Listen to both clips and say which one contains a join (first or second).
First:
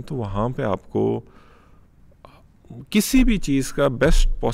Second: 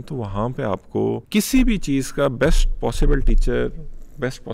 second